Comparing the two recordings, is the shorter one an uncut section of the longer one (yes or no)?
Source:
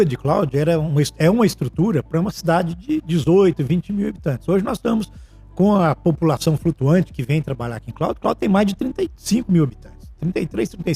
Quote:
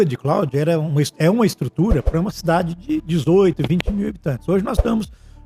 yes